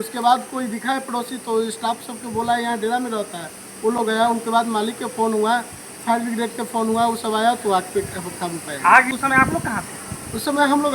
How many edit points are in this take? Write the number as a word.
one